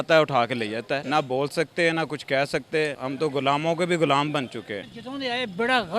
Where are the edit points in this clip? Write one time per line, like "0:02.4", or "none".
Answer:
0:01.0
0:03.0
0:04.8